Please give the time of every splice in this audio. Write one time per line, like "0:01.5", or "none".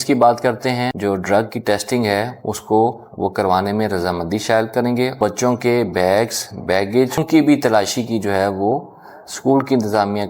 0:00.9
0:05.2
0:07.2